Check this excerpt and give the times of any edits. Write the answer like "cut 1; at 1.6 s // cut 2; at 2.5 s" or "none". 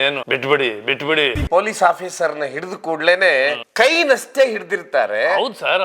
cut 1; at 1.4 s